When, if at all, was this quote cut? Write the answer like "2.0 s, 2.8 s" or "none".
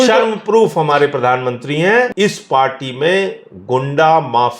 2.1 s